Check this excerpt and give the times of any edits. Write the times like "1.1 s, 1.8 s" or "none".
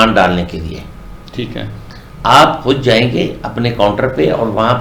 none